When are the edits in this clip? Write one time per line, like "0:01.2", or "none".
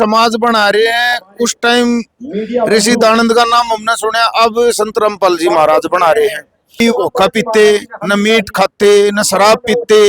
0:06.8